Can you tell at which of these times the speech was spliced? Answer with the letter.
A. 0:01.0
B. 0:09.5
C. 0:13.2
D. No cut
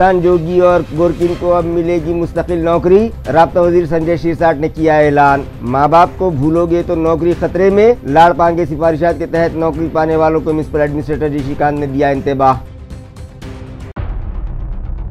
D